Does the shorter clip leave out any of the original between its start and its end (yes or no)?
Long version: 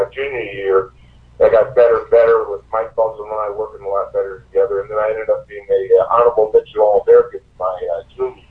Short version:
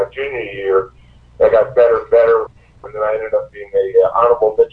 yes